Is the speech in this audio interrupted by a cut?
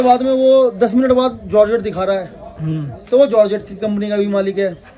no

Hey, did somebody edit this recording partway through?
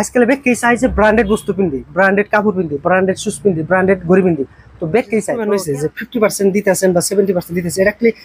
yes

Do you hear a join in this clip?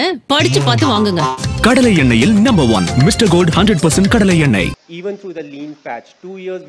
yes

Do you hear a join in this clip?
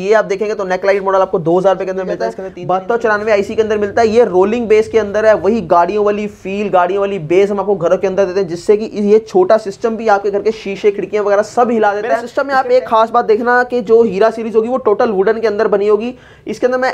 yes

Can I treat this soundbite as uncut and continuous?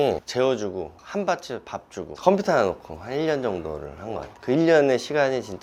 yes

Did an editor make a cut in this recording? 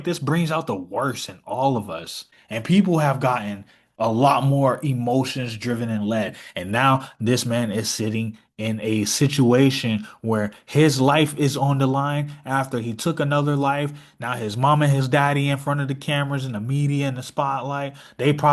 no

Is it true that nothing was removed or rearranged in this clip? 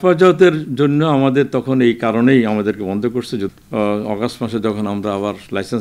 no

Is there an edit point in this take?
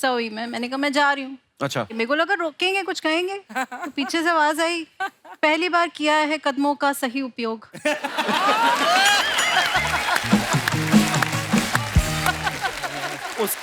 no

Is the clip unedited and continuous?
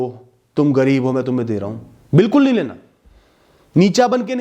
yes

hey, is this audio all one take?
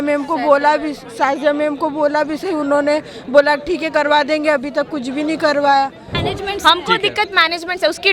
no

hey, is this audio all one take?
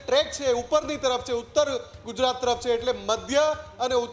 yes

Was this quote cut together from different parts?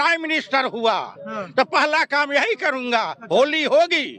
no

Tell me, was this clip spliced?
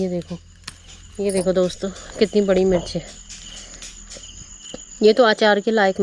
no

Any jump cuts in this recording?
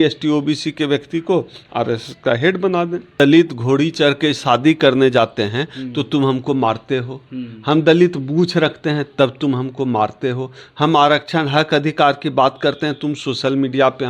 yes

